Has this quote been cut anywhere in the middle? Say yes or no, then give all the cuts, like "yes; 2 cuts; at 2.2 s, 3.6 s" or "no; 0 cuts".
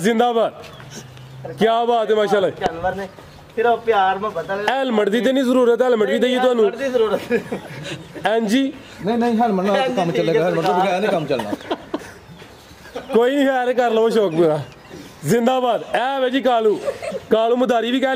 no; 0 cuts